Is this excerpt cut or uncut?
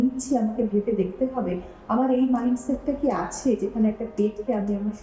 uncut